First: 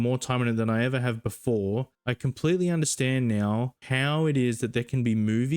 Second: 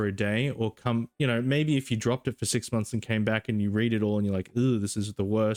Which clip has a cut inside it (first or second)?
first